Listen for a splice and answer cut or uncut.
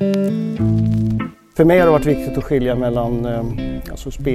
cut